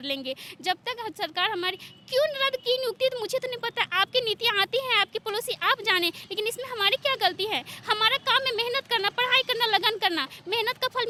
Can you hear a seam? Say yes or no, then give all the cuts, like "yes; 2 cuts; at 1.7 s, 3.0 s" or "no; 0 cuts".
no; 0 cuts